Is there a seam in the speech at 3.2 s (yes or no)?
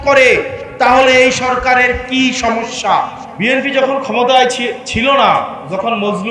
yes